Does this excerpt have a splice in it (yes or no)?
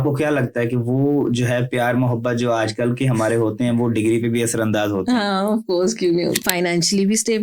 yes